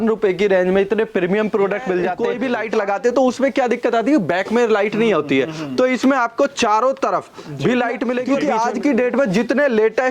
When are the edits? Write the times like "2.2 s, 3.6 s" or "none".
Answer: 2.2 s, 8.3 s